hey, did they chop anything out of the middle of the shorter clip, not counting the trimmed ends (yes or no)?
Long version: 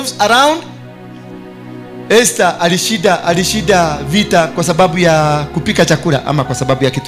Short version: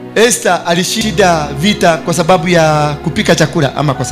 yes